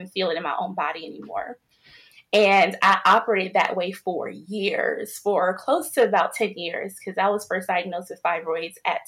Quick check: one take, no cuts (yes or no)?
yes